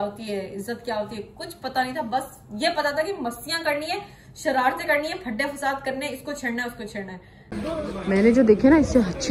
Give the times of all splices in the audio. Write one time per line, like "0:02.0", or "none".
0:07.4